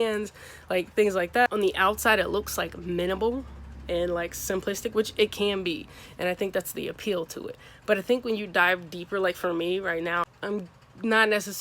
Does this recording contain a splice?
yes; 2 cuts; at 1.5 s, 10.3 s

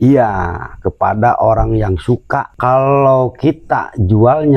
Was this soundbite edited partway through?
yes; 1 cut; at 2.5 s

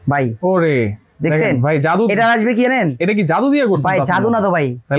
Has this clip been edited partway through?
no; 0 cuts

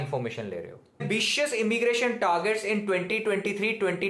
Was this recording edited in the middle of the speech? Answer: yes; 1 cut; at 1.0 s

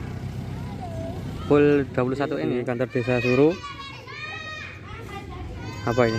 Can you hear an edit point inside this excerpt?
yes; 1 cut; at 2.5 s

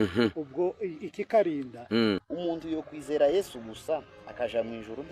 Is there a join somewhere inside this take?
yes; 1 cut; at 2.2 s

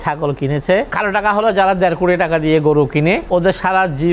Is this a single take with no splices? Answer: no; 2 cuts; at 0.9 s, 3.2 s

